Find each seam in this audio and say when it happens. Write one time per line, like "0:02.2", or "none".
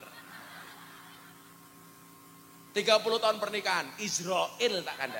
none